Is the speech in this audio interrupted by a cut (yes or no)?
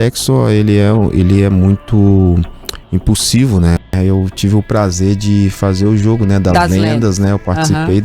yes